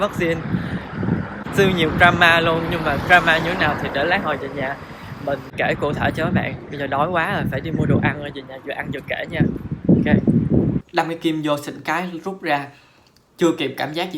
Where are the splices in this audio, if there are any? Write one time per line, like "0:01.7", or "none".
0:01.4
0:05.5
0:10.9